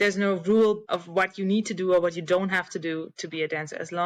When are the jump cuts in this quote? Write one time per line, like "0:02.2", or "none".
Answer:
0:00.9

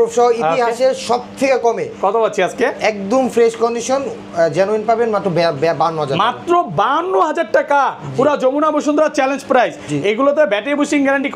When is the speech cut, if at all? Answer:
none

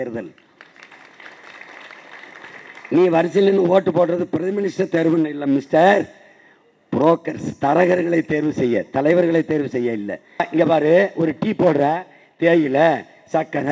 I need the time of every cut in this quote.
0:10.5

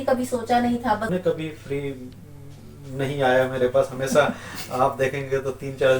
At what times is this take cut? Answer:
0:01.1

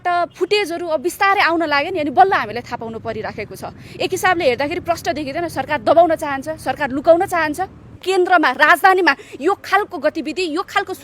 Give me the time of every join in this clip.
0:07.9

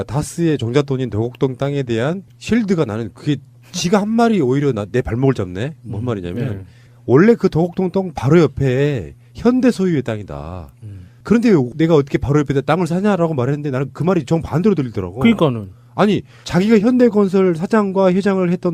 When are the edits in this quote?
0:12.9

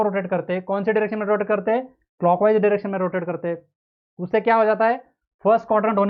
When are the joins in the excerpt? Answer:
none

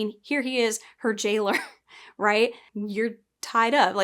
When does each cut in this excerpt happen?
0:02.7

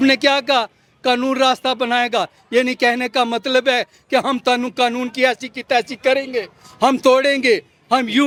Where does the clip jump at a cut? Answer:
none

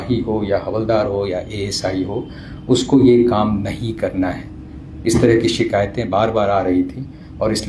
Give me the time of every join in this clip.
none

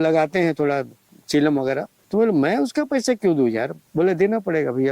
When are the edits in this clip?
0:01.9
0:03.8

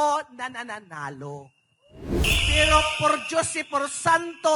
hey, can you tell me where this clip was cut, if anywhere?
0:02.2

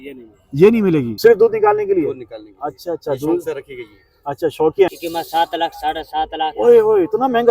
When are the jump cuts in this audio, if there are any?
0:01.1
0:04.9

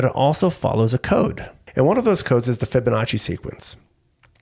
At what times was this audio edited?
0:01.6

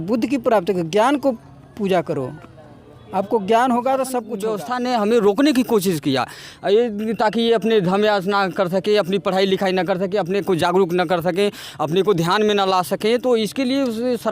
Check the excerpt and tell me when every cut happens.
0:04.3

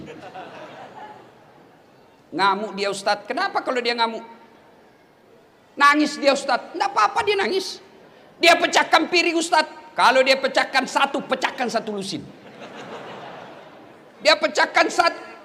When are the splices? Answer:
none

